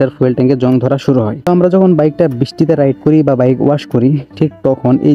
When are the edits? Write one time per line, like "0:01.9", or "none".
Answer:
0:01.3